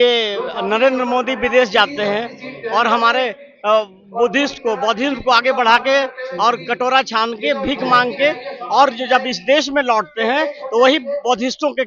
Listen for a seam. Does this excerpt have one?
no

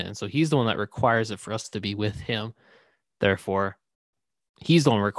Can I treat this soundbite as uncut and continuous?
yes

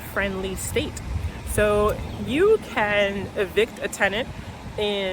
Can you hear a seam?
no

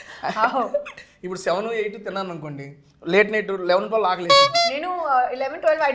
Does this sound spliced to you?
no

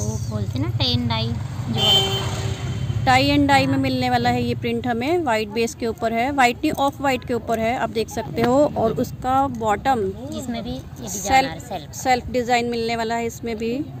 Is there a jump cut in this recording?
no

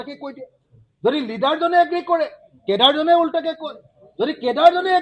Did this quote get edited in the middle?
no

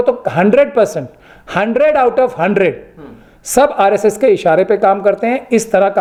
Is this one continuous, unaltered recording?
yes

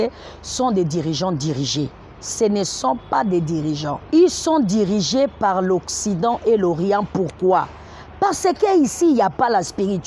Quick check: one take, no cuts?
no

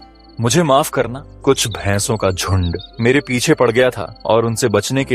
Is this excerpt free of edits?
no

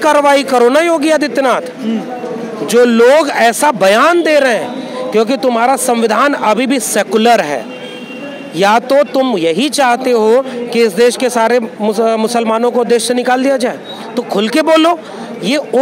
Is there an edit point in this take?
no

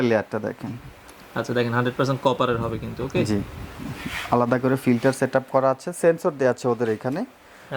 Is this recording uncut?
yes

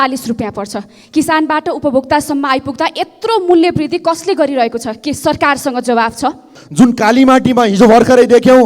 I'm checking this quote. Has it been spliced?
yes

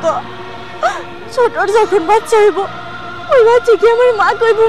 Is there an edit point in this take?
no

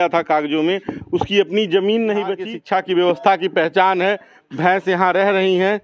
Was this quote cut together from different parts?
yes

